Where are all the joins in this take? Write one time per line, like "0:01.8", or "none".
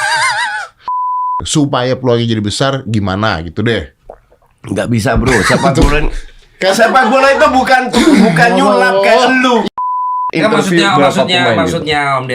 0:01.2
0:09.9